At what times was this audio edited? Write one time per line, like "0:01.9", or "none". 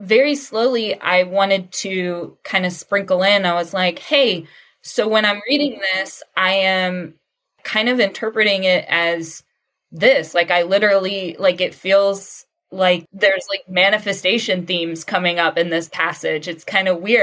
0:13.0